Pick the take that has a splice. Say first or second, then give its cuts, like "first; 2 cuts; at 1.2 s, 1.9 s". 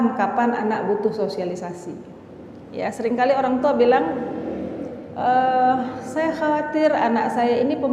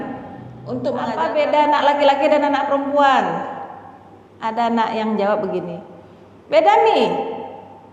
second; 1 cut; at 1.1 s